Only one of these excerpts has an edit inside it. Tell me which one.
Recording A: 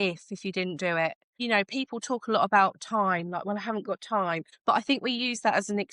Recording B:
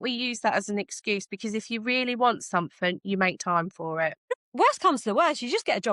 B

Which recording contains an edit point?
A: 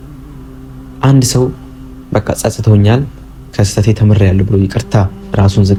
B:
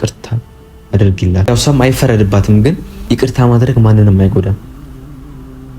B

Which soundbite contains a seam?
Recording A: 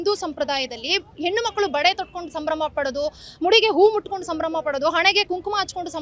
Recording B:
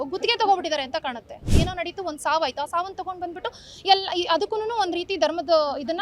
B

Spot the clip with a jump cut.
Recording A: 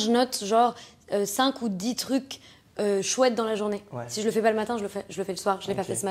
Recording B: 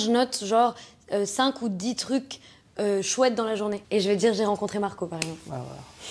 B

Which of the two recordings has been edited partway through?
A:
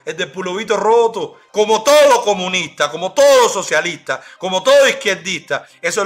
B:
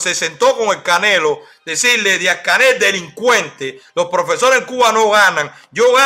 A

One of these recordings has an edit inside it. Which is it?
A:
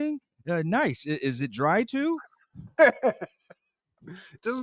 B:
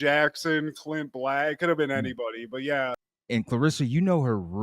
B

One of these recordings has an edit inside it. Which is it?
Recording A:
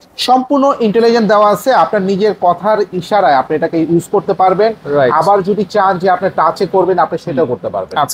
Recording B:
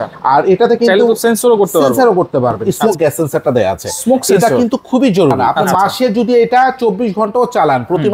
B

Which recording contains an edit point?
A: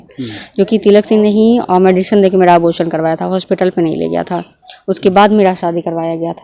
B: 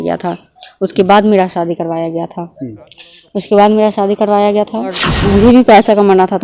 B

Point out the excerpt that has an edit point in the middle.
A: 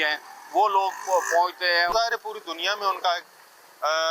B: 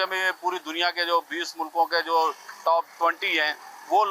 A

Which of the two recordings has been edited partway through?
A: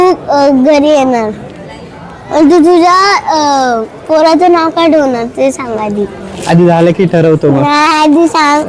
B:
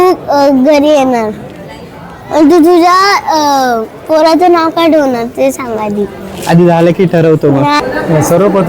B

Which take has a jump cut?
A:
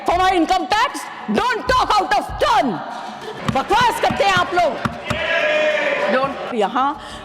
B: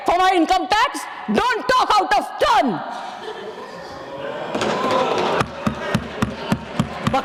A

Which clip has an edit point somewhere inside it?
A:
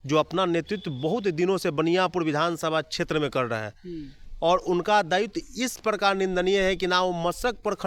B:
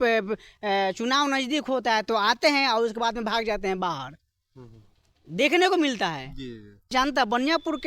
B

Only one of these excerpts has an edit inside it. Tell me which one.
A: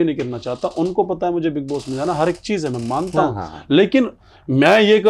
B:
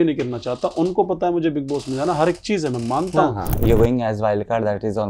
B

